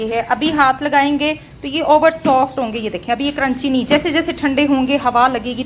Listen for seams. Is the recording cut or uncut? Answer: uncut